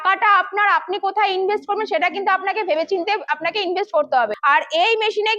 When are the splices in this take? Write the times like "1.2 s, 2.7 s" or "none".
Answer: 4.4 s